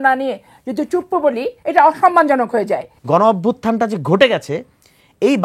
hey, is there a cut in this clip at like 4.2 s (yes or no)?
no